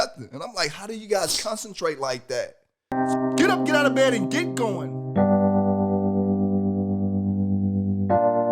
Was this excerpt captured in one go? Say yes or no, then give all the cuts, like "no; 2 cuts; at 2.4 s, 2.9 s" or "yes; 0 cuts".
no; 1 cut; at 3.0 s